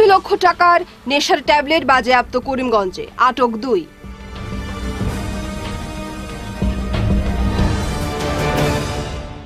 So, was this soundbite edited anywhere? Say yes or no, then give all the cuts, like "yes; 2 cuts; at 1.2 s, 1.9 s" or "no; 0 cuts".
no; 0 cuts